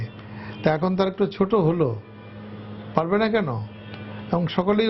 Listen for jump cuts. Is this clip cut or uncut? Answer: uncut